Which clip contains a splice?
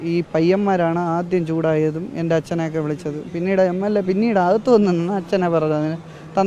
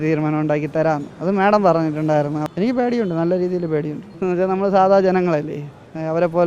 second; 3 cuts; at 1.1 s, 2.4 s, 4.0 s

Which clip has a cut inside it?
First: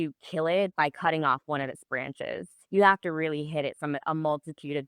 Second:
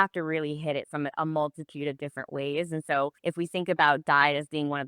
second; 1 cut; at 3.2 s

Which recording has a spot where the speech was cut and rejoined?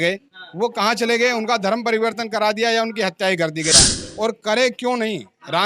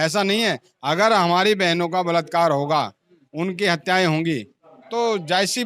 first; 1 cut; at 3.9 s

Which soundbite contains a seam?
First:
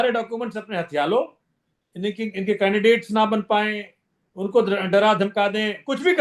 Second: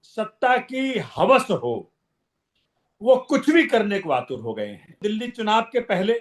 second; 1 cut; at 5.0 s

